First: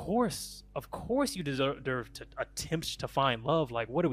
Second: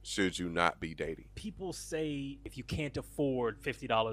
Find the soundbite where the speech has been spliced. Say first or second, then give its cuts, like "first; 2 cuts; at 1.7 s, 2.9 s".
second; 2 cuts; at 1.3 s, 2.6 s